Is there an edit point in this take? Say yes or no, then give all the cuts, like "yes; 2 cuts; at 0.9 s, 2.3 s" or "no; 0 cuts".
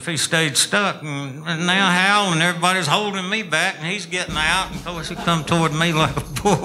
no; 0 cuts